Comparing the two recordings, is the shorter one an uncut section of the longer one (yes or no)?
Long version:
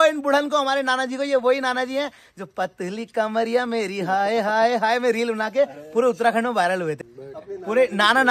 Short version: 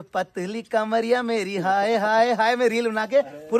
yes